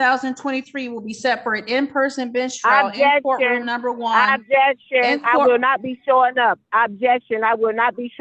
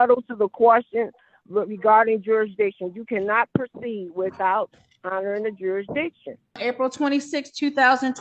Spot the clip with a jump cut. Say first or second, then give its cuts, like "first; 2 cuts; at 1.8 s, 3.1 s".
second; 1 cut; at 6.6 s